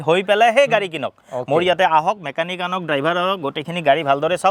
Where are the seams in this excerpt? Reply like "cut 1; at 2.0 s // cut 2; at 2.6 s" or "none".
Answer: none